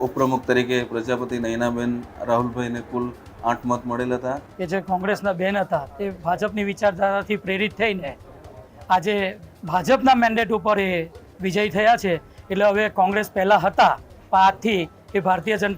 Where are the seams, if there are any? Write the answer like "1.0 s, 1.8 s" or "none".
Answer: 4.5 s